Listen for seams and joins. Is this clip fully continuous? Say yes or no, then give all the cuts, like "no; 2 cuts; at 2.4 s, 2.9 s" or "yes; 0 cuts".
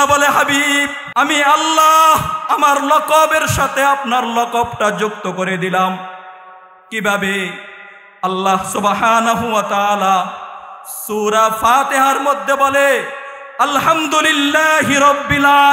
no; 1 cut; at 1.0 s